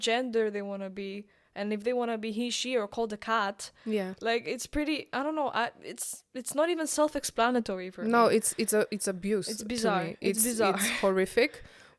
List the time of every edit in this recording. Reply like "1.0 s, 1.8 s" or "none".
none